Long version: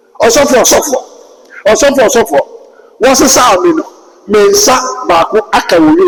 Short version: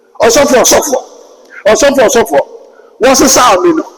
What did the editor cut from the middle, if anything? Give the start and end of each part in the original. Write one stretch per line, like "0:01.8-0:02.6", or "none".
none